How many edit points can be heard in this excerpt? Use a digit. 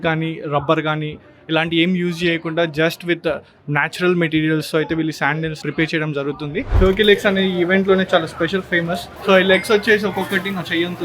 3